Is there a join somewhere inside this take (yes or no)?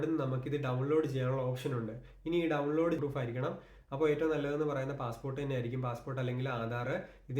yes